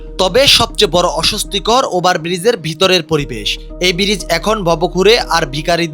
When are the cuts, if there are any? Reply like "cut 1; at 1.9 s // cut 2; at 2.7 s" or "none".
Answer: none